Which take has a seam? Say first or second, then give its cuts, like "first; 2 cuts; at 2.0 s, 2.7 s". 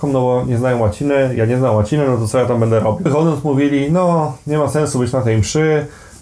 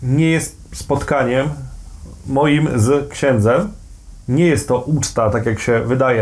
first; 1 cut; at 3.1 s